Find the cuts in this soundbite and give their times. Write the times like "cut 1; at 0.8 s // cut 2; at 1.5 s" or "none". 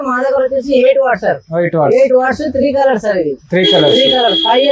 none